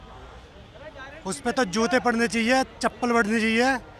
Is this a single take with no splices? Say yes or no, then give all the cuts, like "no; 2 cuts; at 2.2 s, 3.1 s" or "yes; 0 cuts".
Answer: yes; 0 cuts